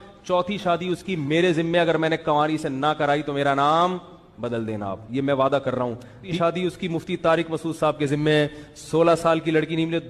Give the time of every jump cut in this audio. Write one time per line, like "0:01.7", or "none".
0:06.3